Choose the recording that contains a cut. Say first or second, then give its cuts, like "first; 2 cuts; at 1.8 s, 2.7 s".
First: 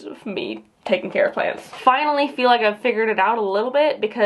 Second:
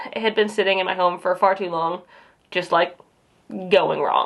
first; 1 cut; at 1.7 s